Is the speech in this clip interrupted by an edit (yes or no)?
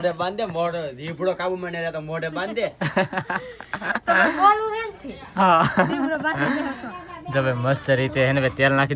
no